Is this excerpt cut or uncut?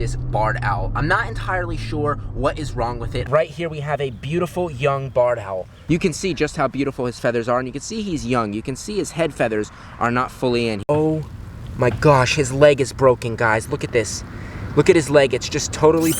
cut